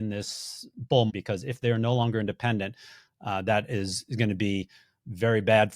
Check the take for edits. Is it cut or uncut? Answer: cut